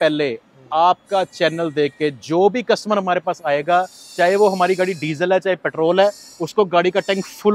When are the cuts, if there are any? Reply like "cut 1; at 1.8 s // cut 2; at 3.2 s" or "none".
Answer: none